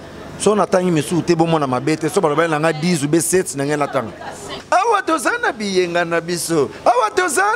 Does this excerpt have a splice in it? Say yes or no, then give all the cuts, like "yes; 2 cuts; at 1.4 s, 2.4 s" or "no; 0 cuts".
yes; 1 cut; at 4.5 s